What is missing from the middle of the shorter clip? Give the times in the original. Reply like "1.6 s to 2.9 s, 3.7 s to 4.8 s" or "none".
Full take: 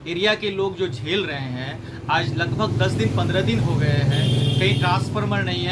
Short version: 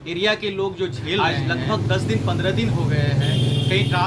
1.2 s to 2.1 s